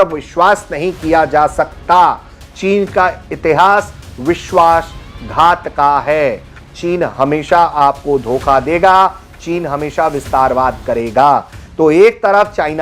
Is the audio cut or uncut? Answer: uncut